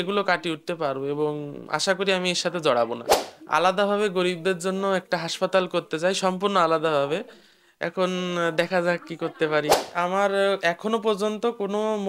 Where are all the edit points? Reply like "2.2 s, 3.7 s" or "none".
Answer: 3.1 s, 9.9 s